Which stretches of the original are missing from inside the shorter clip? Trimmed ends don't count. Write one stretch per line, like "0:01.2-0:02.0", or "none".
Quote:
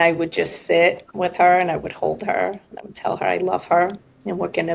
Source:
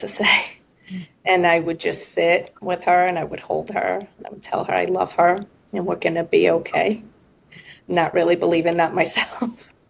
none